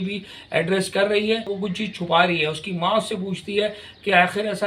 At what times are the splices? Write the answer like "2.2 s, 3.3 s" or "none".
1.5 s